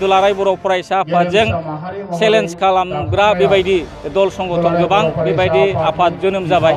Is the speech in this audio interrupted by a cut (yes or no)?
no